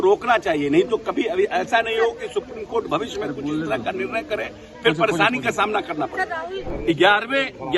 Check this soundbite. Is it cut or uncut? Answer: cut